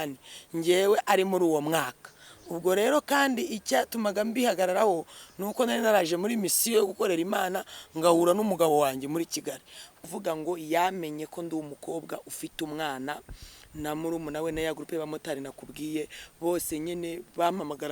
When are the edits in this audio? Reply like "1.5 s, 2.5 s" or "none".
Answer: 10.0 s